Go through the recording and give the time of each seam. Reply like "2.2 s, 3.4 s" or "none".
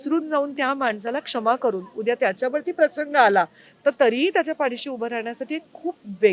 none